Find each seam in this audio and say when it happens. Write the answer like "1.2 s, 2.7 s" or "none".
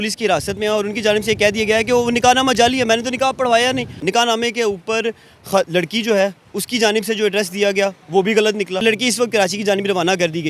4.0 s, 8.8 s